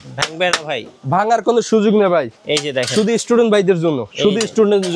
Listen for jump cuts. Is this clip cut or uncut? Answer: uncut